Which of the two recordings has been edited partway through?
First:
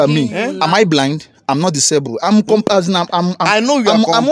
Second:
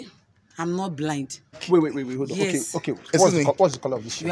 second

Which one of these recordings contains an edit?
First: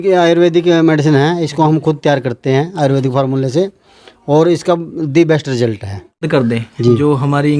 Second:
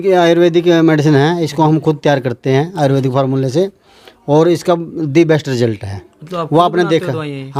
first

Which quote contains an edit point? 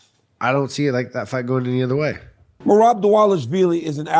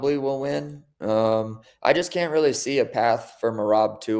first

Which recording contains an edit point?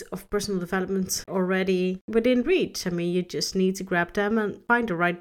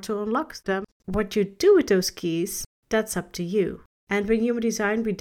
second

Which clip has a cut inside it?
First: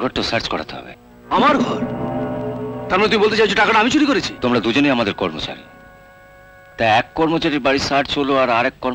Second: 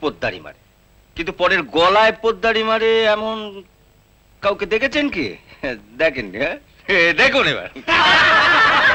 first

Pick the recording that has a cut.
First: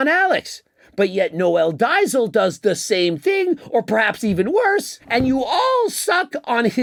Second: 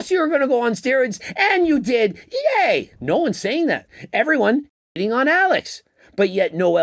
second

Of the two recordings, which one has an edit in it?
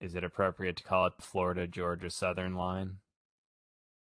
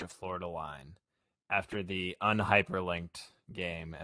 first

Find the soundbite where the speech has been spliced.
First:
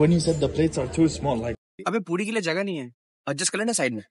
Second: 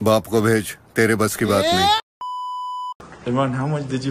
second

